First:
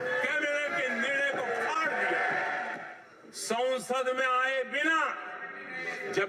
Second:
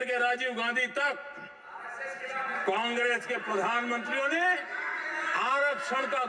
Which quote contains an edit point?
first; 1 cut; at 2.8 s

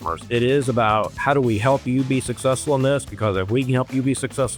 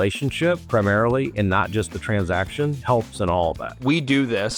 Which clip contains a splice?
second; 1 cut; at 3.7 s

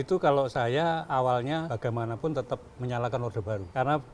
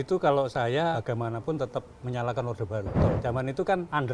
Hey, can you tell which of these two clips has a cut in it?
second; 2 cuts; at 1.0 s, 3.0 s

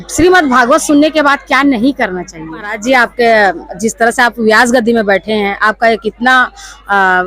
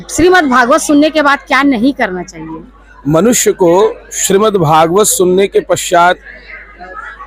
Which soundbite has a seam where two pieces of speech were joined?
first; 1 cut; at 2.7 s

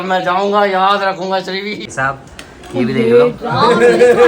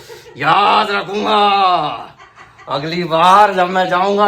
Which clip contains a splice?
first; 1 cut; at 1.8 s

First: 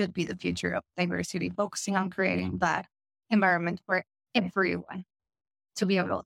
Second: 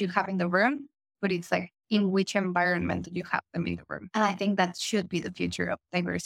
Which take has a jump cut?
second; 1 cut; at 4.0 s

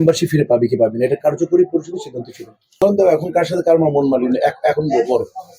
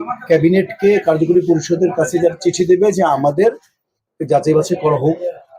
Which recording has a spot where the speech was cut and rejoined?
first; 1 cut; at 2.8 s

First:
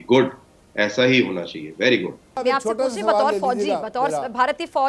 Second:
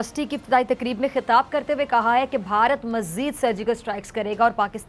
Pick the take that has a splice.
first; 1 cut; at 2.3 s

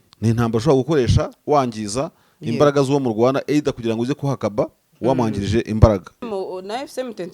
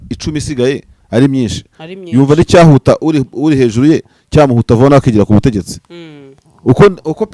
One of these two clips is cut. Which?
first; 1 cut; at 6.2 s

